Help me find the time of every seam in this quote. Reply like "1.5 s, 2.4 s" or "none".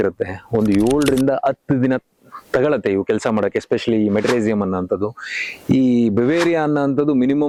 none